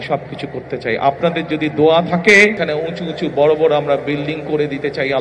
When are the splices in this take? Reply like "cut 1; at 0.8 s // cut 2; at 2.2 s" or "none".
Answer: cut 1; at 2.6 s